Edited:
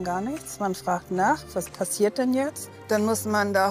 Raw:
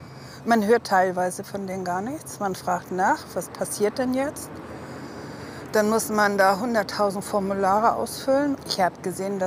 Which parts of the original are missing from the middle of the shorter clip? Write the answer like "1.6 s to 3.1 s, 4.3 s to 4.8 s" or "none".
4.5 s to 5.5 s